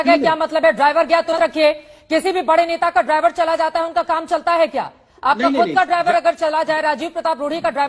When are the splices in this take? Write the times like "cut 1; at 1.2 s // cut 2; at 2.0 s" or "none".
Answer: cut 1; at 1.3 s